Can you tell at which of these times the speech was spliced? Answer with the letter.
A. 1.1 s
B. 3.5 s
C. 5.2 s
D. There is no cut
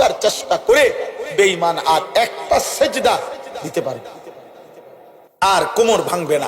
C